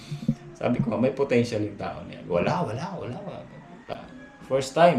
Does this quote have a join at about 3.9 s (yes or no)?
yes